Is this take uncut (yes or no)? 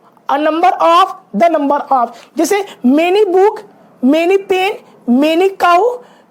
yes